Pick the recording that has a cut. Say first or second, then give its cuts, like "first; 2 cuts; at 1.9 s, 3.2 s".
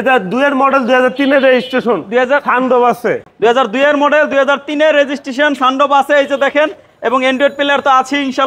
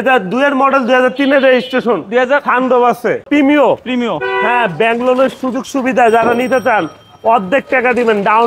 second; 1 cut; at 3.3 s